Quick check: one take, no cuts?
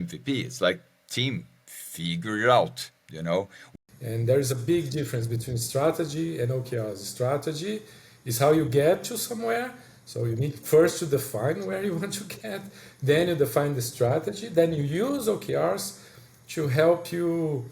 no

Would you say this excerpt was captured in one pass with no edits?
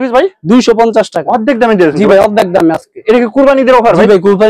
yes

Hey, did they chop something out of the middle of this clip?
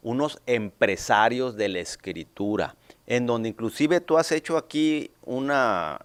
no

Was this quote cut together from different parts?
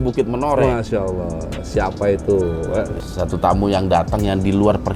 yes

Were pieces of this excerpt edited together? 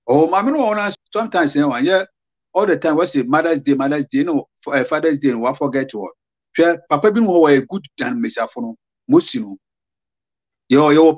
yes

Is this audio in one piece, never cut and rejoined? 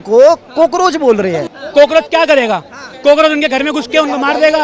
no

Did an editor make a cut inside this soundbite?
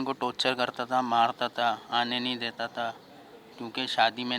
no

